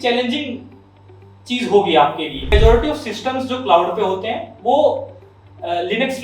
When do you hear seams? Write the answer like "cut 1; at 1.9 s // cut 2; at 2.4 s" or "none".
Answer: cut 1; at 2.5 s

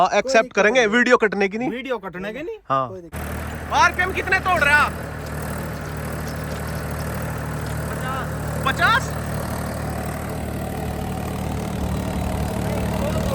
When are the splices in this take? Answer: cut 1; at 3.1 s

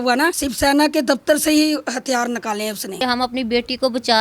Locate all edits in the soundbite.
cut 1; at 3.0 s

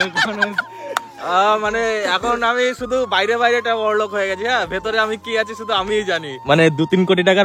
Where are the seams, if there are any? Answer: cut 1; at 6.3 s

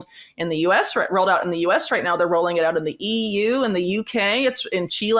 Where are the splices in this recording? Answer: none

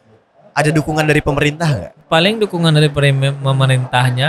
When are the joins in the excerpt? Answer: cut 1; at 2.1 s

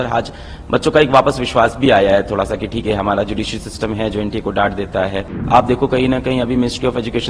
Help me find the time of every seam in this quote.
cut 1; at 5.3 s

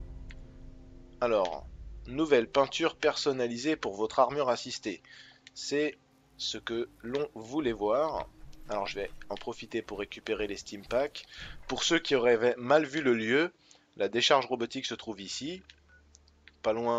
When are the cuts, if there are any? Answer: cut 1; at 9.1 s

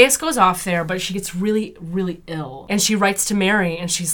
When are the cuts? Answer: cut 1; at 2.5 s

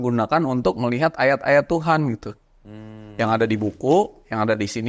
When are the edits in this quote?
none

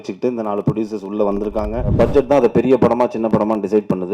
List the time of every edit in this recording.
cut 1; at 1.9 s

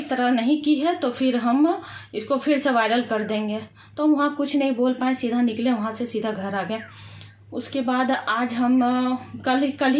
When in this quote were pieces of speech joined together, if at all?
none

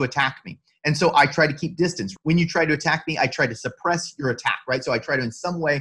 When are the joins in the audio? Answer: cut 1; at 2.1 s

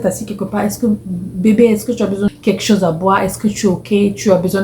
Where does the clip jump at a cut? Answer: cut 1; at 2.3 s

